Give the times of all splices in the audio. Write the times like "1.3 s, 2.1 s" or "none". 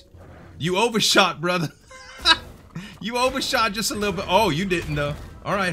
none

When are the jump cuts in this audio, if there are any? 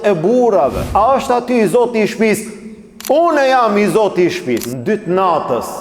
0.8 s, 4.7 s

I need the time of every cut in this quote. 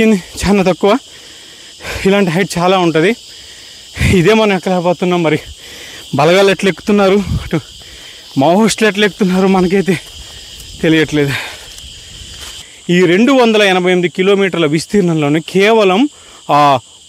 12.7 s

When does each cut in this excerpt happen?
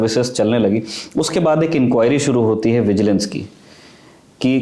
none

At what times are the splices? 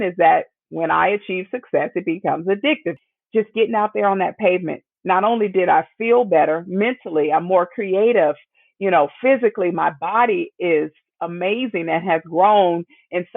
2.9 s

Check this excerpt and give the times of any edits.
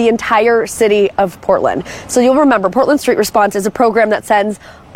1.6 s

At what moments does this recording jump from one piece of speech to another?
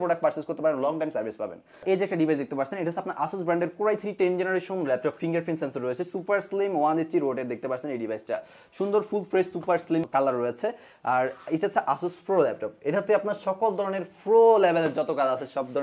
none

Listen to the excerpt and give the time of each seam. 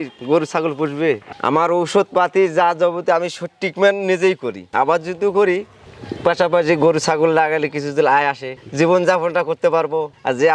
1.2 s, 4.6 s

